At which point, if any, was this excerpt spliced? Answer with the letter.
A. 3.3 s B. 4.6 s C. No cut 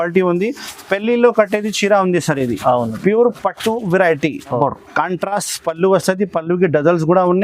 B